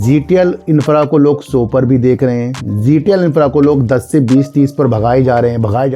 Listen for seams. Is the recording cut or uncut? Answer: uncut